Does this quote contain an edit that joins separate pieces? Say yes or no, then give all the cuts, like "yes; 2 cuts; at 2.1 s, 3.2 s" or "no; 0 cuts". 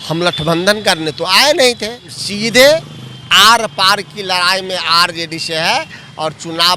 yes; 1 cut; at 2.2 s